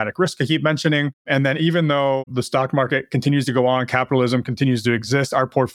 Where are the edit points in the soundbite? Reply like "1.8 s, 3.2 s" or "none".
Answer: 1.2 s, 2.3 s